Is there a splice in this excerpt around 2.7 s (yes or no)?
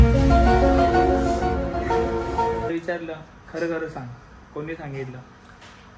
yes